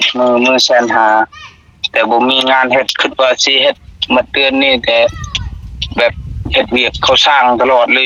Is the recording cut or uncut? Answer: uncut